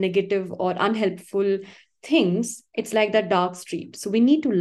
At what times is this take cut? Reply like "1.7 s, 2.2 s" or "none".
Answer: none